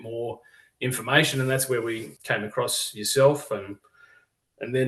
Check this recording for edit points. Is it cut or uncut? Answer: cut